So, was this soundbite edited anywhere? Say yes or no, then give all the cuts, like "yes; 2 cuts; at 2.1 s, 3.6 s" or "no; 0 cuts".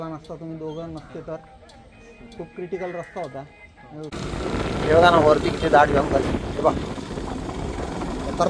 yes; 1 cut; at 4.1 s